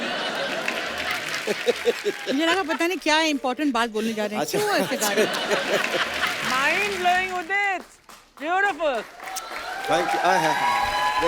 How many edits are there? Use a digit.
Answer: 1